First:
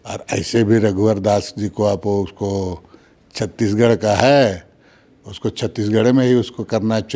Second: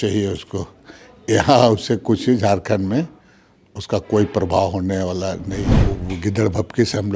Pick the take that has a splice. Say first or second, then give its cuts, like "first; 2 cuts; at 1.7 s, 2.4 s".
second; 1 cut; at 5.5 s